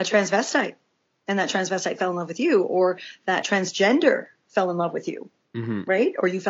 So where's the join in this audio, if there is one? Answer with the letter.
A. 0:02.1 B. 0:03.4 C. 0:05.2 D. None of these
B